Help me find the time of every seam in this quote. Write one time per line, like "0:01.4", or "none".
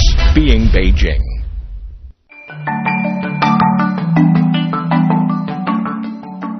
0:01.2